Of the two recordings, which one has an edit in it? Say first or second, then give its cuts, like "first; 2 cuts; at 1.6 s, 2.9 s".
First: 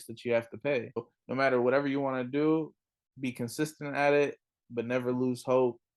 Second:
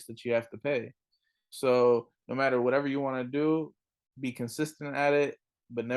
first; 1 cut; at 1.2 s